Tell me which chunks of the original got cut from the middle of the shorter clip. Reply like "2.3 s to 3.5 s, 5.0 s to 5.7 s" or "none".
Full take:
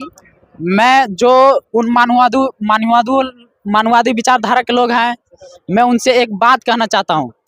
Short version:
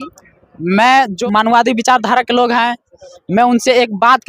1.1 s to 3.5 s